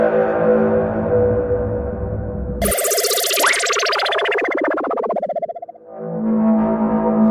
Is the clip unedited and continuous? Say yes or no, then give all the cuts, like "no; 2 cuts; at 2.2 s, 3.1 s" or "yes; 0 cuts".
no; 1 cut; at 1.0 s